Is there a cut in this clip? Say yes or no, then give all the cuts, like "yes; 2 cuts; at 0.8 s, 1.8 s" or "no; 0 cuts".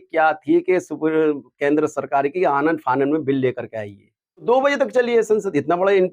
yes; 1 cut; at 4.4 s